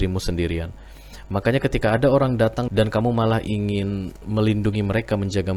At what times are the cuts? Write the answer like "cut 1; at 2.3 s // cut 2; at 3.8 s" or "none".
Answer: none

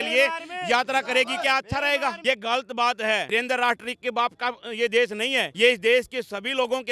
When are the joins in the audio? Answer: cut 1; at 2.2 s // cut 2; at 3.3 s // cut 3; at 5.5 s

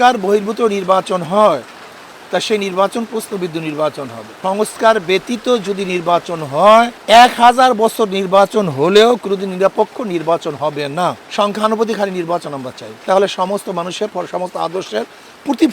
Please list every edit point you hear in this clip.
cut 1; at 4.3 s // cut 2; at 11.2 s

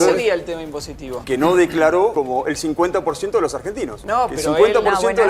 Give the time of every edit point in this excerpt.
cut 1; at 1.2 s // cut 2; at 2.1 s // cut 3; at 3.9 s

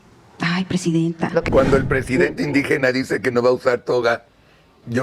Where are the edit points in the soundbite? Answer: cut 1; at 1.4 s

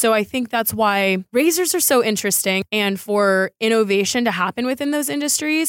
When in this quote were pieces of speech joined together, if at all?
cut 1; at 1.2 s // cut 2; at 2.6 s

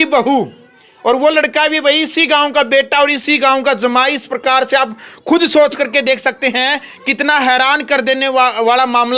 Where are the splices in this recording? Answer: none

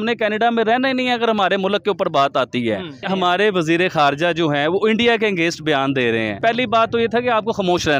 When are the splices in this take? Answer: cut 1; at 3.1 s // cut 2; at 6.4 s

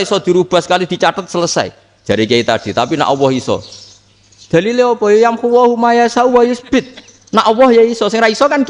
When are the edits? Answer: none

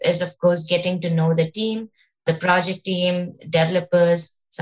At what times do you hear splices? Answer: cut 1; at 2.2 s

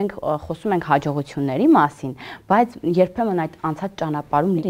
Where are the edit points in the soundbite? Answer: none

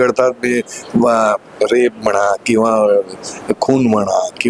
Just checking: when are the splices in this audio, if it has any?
none

